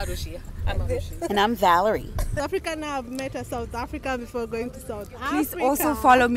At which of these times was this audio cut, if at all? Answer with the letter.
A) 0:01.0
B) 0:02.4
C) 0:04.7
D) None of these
B